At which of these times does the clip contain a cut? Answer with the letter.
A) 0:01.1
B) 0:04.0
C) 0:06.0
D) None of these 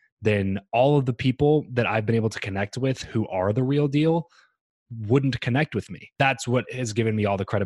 C